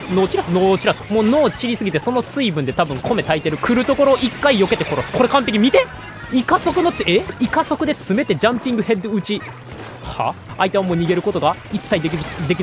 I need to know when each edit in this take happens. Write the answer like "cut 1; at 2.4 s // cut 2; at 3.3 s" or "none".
cut 1; at 1.0 s // cut 2; at 3.6 s // cut 3; at 7.3 s // cut 4; at 10.5 s